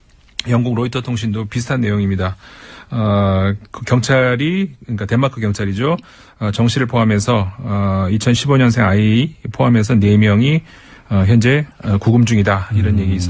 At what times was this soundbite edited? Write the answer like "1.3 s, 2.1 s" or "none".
2.8 s